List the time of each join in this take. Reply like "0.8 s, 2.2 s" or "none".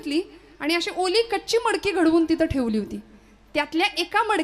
none